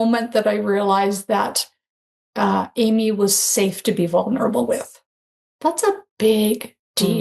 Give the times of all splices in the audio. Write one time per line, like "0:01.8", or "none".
none

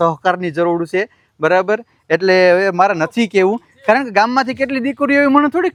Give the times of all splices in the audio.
none

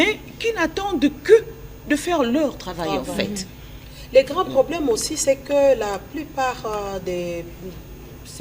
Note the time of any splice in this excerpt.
none

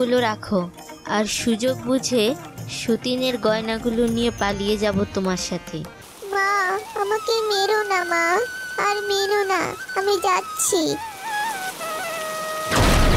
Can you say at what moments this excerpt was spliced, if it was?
0:06.0

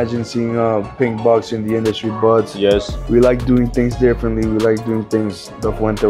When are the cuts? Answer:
none

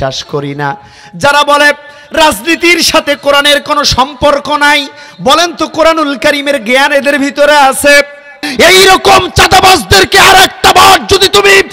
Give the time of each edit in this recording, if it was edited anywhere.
0:08.4

